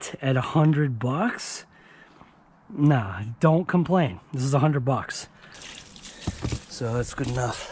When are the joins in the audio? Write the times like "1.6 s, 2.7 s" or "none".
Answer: 5.6 s